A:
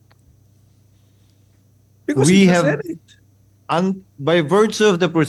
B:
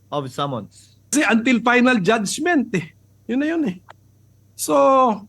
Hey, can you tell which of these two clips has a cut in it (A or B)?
B